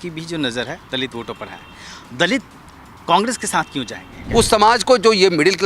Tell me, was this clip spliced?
yes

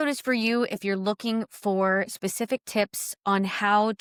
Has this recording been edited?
no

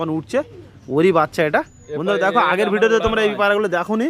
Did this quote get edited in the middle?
yes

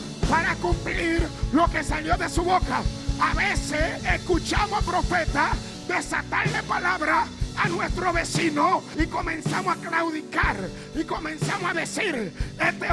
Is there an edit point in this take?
yes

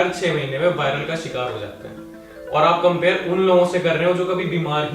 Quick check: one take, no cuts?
yes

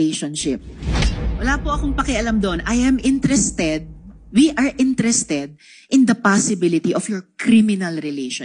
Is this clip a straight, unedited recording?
yes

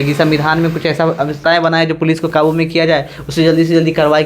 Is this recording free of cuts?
no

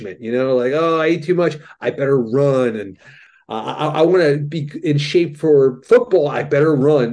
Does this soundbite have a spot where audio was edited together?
yes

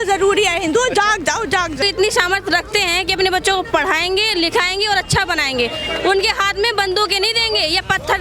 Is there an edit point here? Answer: yes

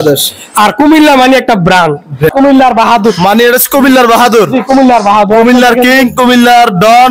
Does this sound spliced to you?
yes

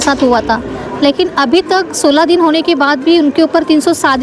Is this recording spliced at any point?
no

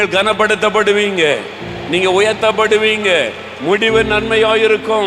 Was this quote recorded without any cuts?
yes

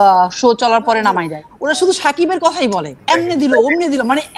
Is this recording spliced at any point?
yes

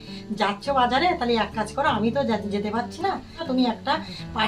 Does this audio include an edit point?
yes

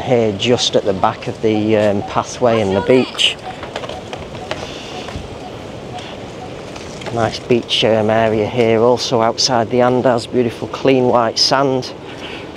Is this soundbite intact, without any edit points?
yes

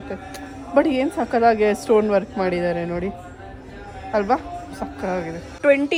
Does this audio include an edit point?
no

